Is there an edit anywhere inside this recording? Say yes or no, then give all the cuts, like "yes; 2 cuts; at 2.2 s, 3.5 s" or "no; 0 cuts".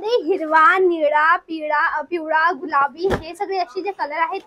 no; 0 cuts